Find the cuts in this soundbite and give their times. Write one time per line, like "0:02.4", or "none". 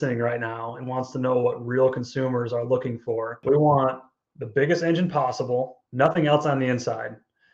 0:03.4
0:05.8